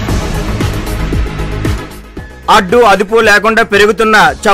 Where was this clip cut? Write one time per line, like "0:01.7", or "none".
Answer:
0:01.0
0:01.8

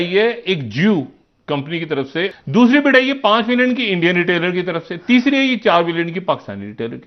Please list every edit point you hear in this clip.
0:02.3

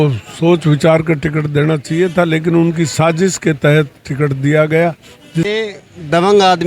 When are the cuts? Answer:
0:05.5

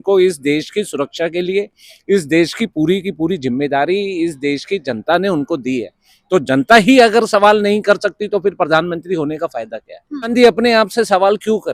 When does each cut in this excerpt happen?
0:10.3

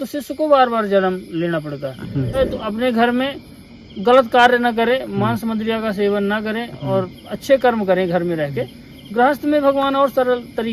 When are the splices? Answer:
0:02.4

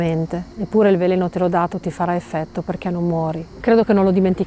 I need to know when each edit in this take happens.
0:03.5

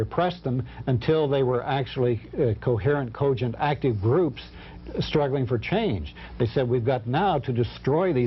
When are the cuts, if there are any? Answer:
none

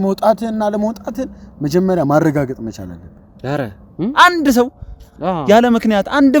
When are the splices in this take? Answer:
0:03.8

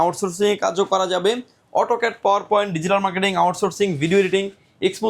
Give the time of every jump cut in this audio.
none

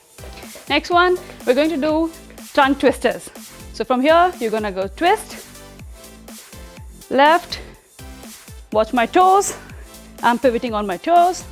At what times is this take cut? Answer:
0:05.5
0:07.0

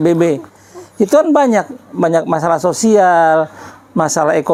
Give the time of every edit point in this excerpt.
none

